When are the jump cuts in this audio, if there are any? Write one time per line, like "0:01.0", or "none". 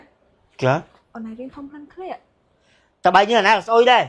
0:01.0